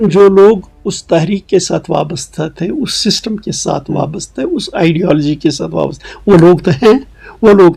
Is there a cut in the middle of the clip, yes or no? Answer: no